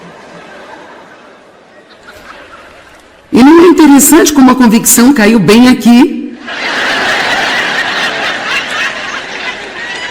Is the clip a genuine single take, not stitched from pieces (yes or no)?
no